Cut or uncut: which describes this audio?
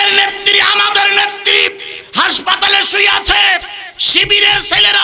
uncut